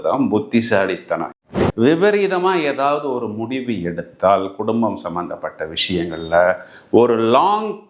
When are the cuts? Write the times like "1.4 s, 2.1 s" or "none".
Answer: 1.4 s